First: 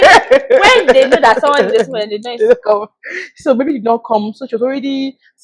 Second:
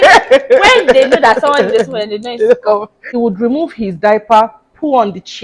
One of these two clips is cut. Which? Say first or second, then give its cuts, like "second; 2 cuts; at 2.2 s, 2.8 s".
second; 1 cut; at 3.0 s